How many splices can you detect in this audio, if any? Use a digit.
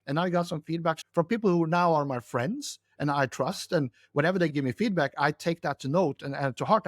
1